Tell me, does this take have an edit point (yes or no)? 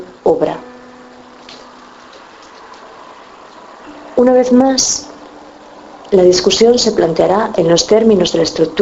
yes